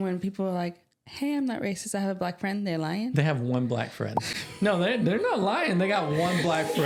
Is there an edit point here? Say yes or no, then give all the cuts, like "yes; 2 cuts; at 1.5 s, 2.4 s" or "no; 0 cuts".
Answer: no; 0 cuts